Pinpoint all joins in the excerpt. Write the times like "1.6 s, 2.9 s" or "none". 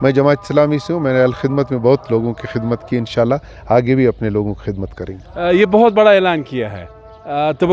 none

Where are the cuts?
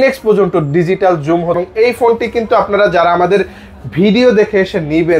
1.6 s

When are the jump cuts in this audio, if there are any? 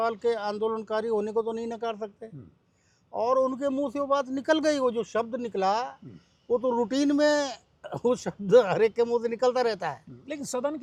none

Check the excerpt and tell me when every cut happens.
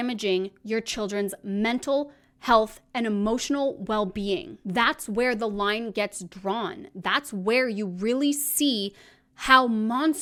none

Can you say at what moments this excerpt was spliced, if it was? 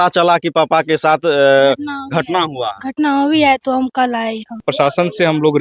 4.7 s

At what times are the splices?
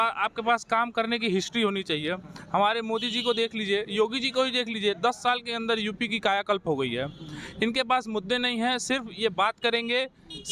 none

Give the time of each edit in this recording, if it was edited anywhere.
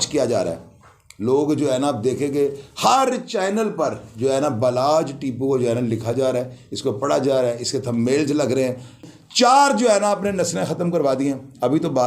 9.0 s

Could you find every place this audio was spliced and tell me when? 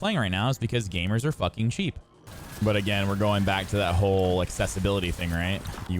2.1 s

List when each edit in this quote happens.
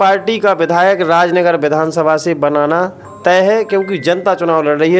none

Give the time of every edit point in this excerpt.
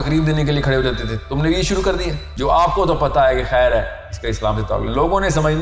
2.3 s

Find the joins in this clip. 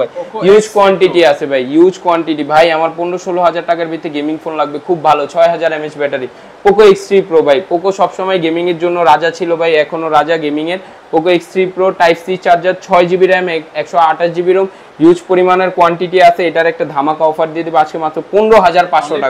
none

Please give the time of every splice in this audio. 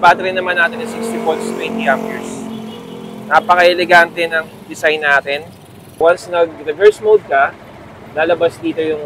6.0 s

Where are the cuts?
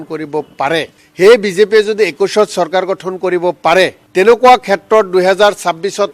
1.0 s, 4.0 s

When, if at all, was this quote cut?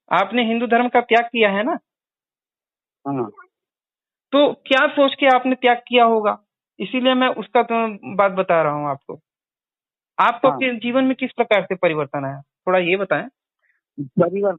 none

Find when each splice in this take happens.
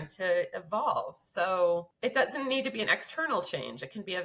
1.9 s

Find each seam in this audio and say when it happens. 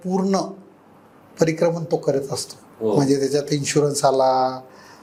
none

